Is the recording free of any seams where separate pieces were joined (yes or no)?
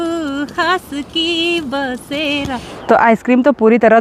no